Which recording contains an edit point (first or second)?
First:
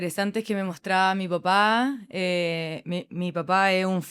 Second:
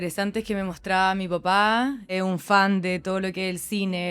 second